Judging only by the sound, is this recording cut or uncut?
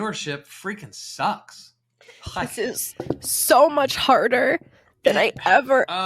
uncut